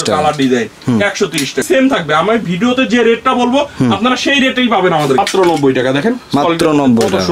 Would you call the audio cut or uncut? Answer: cut